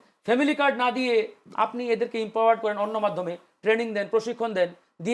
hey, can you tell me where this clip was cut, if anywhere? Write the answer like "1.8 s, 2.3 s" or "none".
none